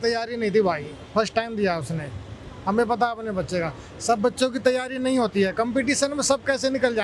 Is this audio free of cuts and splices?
yes; 0 cuts

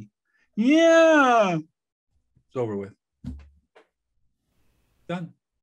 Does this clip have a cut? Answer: no; 0 cuts

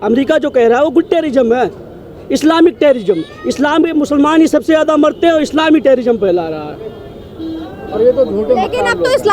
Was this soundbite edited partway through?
no; 0 cuts

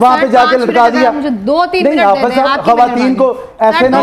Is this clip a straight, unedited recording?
yes; 0 cuts

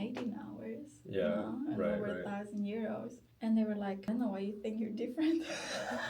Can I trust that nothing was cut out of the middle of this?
no; 2 cuts; at 3.2 s, 4.0 s

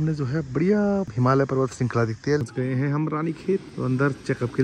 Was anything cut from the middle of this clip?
yes; 3 cuts; at 1.1 s, 2.4 s, 3.7 s

